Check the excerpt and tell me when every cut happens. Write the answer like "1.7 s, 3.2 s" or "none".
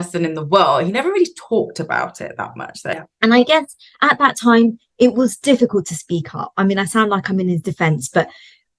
2.9 s